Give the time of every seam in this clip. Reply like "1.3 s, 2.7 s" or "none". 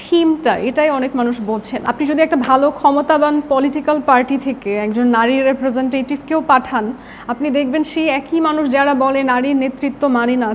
1.8 s